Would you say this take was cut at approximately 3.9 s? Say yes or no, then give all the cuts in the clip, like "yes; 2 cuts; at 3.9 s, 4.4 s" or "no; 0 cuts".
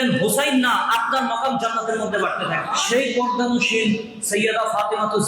no; 1 cut; at 2.6 s